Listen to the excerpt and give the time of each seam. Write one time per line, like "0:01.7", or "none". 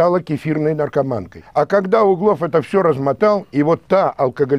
none